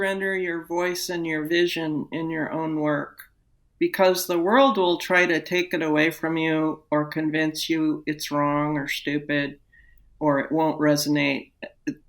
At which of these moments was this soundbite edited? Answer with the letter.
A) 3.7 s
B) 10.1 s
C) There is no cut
B